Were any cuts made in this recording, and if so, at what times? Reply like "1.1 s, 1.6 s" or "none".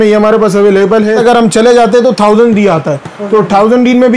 1.2 s